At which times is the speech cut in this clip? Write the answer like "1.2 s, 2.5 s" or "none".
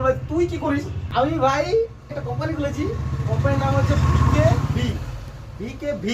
1.0 s, 2.1 s